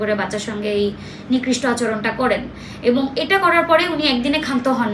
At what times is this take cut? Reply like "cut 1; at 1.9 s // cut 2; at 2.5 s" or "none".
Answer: none